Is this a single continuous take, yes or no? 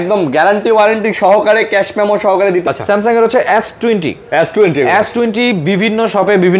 no